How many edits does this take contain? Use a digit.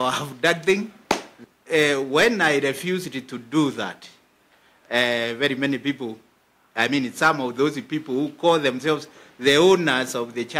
1